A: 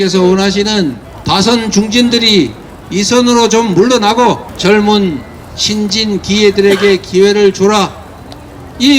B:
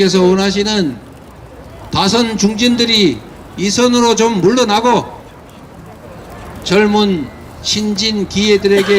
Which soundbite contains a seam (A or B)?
A